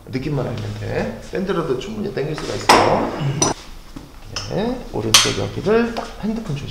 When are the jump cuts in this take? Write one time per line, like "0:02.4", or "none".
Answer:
none